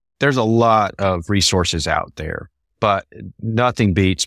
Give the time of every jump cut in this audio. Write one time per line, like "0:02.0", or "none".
none